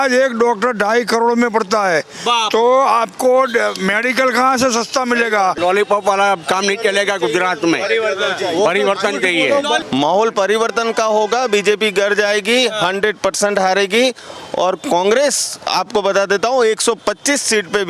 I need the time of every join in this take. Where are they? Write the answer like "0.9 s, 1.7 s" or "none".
5.6 s, 9.8 s